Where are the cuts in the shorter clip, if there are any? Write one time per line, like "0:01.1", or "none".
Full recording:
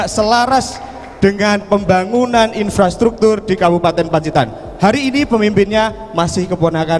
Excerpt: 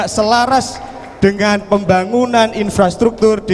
none